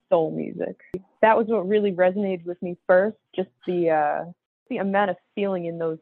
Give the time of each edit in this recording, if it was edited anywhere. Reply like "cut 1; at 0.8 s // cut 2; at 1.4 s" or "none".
cut 1; at 1.0 s // cut 2; at 4.7 s

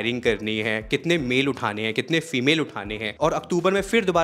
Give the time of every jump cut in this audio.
cut 1; at 3.1 s

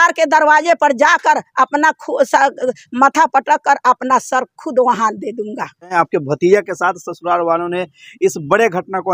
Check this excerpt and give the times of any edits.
none

